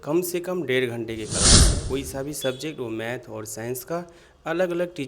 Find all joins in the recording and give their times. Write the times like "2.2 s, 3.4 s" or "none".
1.7 s

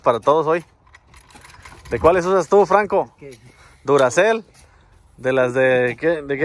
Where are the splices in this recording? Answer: none

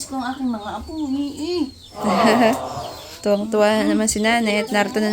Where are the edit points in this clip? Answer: none

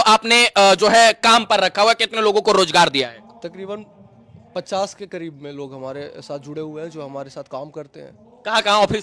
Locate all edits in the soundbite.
none

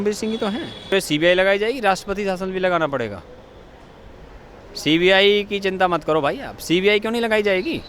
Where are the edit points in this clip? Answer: 0.9 s

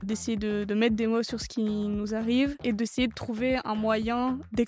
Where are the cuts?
none

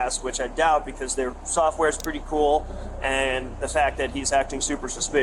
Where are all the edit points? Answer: none

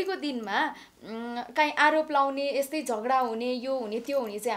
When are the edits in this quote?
none

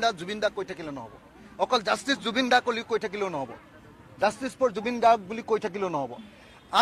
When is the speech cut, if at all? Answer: none

